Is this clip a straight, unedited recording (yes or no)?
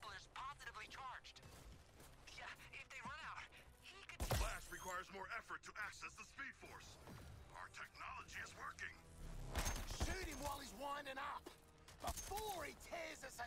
yes